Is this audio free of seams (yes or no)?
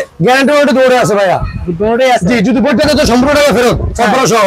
yes